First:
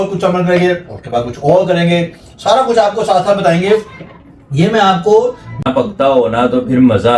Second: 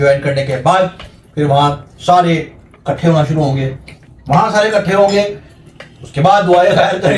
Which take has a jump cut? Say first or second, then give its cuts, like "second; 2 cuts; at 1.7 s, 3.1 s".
first; 1 cut; at 5.6 s